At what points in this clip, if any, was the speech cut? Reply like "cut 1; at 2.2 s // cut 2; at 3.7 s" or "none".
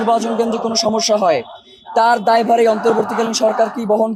none